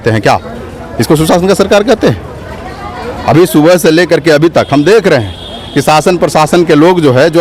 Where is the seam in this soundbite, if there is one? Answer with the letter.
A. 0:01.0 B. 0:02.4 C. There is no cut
C